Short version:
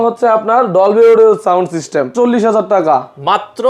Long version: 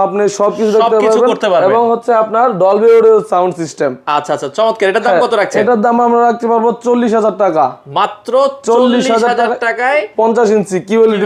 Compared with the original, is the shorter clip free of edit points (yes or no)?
no